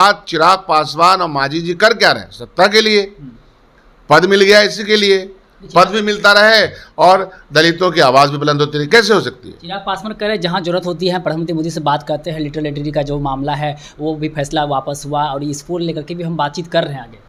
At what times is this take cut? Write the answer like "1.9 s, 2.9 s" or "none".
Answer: none